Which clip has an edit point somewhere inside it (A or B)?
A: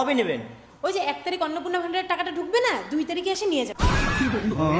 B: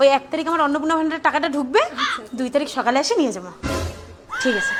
A